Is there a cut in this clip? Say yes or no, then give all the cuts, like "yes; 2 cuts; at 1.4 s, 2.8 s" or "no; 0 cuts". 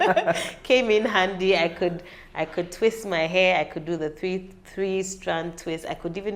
no; 0 cuts